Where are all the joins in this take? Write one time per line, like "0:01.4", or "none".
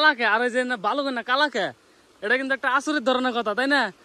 none